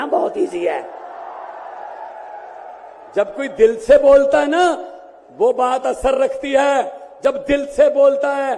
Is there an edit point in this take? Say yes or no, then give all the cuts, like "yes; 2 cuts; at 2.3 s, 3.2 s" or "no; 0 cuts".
no; 0 cuts